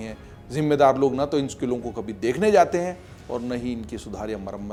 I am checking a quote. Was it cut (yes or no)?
no